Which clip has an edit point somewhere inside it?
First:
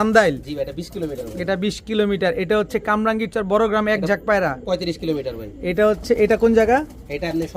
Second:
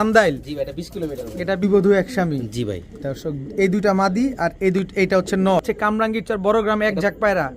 second; 2 cuts; at 1.6 s, 5.6 s

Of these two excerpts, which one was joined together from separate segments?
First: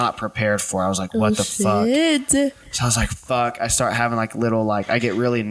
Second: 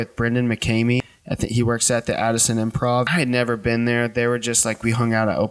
second; 2 cuts; at 1.2 s, 3.1 s

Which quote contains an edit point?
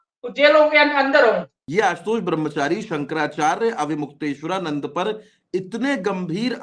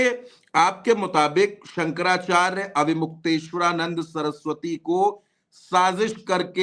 first; 1 cut; at 1.6 s

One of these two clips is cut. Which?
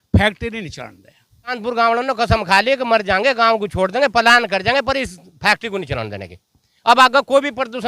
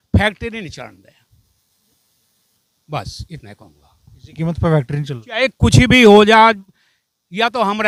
first; 1 cut; at 1.6 s

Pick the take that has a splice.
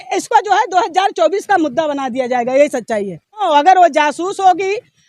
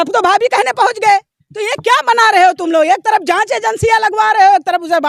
first; 1 cut; at 3.4 s

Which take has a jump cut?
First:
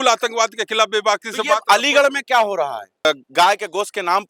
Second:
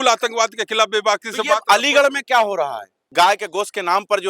second; 1 cut; at 3.0 s

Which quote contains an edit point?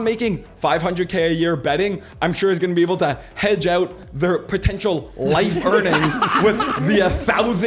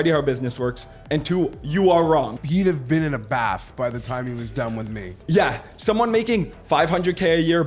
second; 2 cuts; at 2.4 s, 5.2 s

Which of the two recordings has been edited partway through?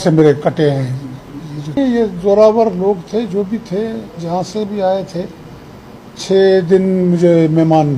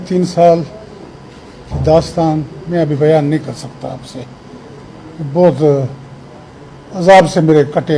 first; 1 cut; at 1.8 s

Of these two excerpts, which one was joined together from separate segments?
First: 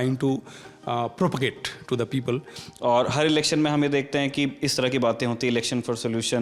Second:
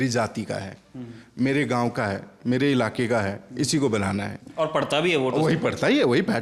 first; 1 cut; at 2.6 s

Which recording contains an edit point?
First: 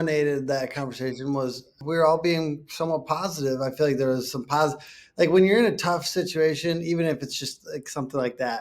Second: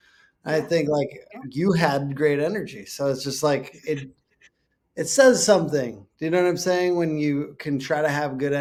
first; 1 cut; at 1.8 s

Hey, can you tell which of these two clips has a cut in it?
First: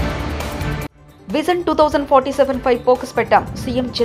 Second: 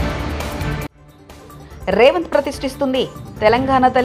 first; 1 cut; at 1.0 s

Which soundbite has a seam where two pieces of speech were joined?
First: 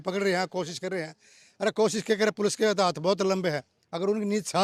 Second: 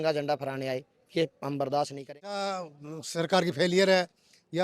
second; 1 cut; at 2.5 s

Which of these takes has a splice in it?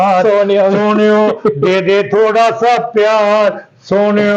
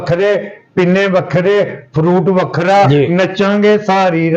second; 1 cut; at 2.9 s

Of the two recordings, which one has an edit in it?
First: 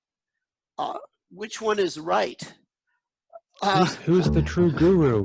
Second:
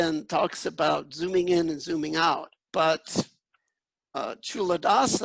second; 1 cut; at 2.6 s

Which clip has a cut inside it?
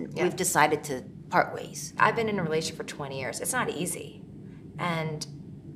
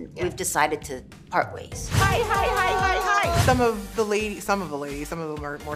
second; 2 cuts; at 1.8 s, 3.4 s

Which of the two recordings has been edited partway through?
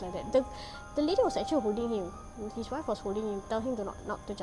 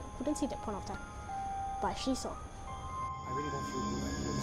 second; 1 cut; at 2.5 s

